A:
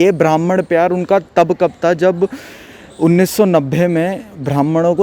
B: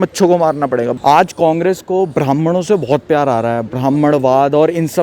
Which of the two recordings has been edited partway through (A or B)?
B